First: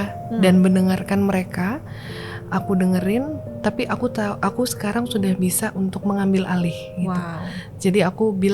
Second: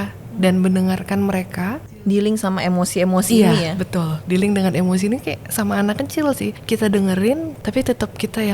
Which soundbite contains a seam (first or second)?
second